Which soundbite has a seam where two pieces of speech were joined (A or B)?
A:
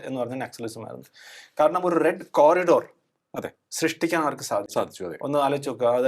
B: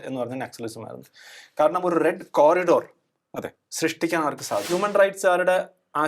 B